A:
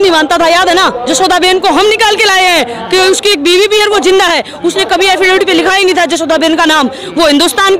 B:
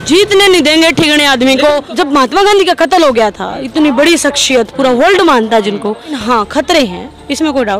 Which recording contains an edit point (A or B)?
B